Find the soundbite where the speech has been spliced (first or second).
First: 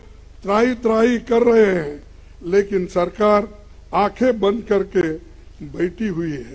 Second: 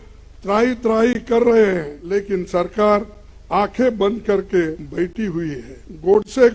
second